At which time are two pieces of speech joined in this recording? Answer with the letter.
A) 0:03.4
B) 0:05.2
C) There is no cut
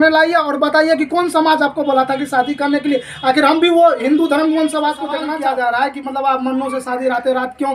B